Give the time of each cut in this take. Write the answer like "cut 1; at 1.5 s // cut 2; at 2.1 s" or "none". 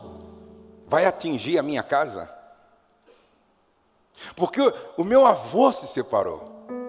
none